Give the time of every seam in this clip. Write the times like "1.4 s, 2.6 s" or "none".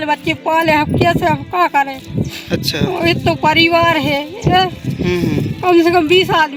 none